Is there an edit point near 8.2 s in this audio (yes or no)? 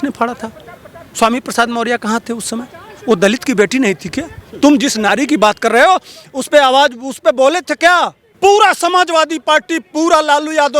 yes